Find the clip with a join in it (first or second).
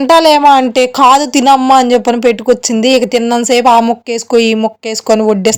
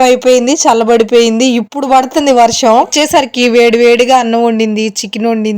second